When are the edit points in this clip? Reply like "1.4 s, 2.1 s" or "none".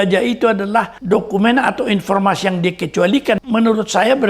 1.0 s, 3.4 s